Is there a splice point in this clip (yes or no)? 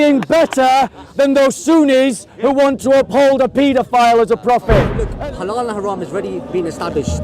yes